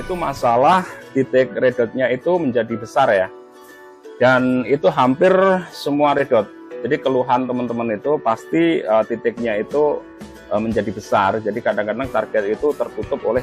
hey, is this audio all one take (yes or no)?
yes